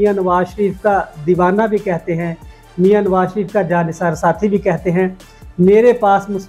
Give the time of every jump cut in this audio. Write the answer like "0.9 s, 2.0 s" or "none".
none